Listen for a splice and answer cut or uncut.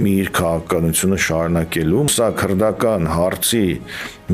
cut